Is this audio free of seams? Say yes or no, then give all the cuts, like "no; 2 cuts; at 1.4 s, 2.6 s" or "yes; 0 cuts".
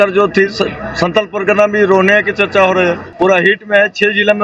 no; 1 cut; at 3.1 s